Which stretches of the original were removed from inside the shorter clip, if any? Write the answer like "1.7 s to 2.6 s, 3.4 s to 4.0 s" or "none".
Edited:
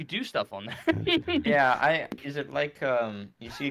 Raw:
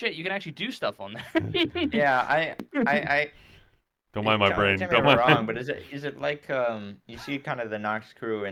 2.6 s to 5.8 s

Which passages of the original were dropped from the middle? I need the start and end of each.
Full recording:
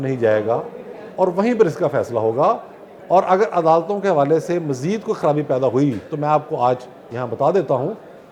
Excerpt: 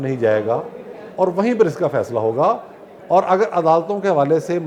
none

